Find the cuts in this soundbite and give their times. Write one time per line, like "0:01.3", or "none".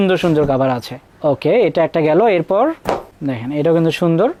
none